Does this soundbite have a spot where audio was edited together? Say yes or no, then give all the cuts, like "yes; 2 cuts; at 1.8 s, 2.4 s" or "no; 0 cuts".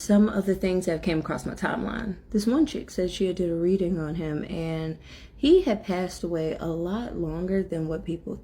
no; 0 cuts